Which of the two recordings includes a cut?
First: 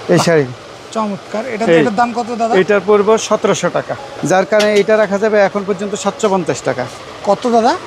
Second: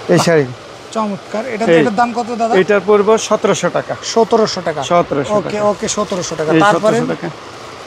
first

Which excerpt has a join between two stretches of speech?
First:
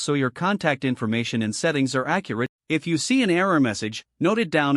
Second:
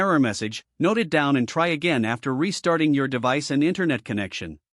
first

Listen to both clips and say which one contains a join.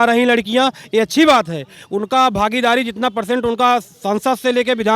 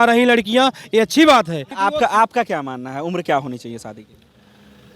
second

